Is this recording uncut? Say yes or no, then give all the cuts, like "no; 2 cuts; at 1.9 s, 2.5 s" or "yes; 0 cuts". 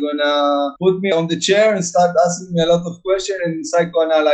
yes; 0 cuts